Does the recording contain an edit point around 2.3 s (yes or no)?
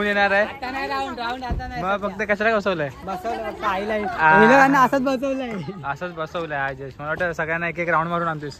no